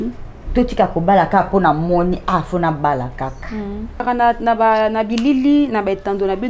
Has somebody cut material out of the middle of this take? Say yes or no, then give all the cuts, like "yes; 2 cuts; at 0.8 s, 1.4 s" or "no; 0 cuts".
yes; 1 cut; at 4.0 s